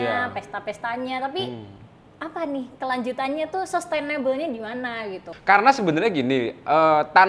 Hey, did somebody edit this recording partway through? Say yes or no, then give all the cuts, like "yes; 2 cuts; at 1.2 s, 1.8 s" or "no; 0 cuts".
yes; 1 cut; at 5.3 s